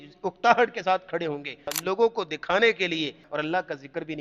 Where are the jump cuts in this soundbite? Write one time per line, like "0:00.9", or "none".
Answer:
0:01.7
0:03.2